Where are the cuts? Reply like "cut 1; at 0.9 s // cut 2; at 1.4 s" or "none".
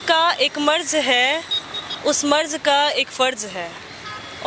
none